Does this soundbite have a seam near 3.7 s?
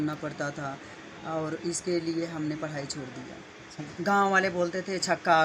yes; 1 cut; at 3.7 s

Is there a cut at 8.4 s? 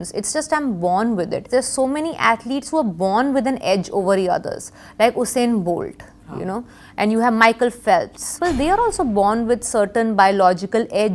yes; 2 cuts; at 1.5 s, 8.4 s

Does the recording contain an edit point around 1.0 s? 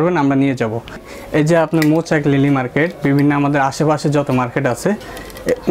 yes; 1 cut; at 1.0 s

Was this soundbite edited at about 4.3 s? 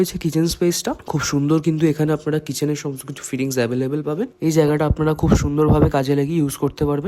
yes; 2 cuts; at 0.9 s, 4.3 s

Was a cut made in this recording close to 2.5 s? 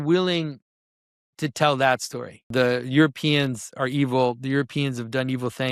yes; 1 cut; at 2.5 s

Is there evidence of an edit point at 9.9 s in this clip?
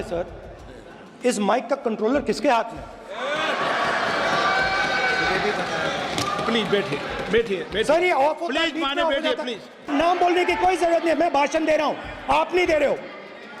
yes; 1 cut; at 9.9 s

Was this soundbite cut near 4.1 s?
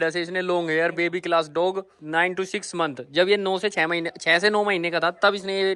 no; 0 cuts

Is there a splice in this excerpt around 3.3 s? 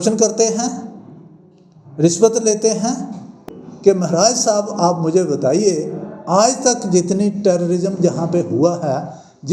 yes; 1 cut; at 3.3 s

